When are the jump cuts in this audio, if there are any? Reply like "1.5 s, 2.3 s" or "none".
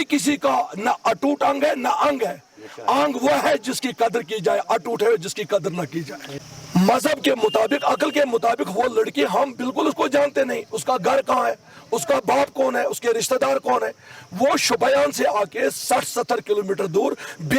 6.2 s

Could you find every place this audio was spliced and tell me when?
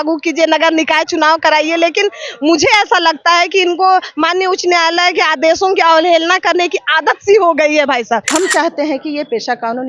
8.3 s

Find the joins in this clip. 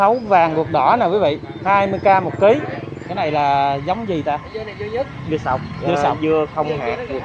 3.0 s

